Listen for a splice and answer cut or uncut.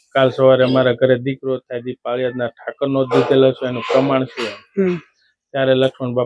uncut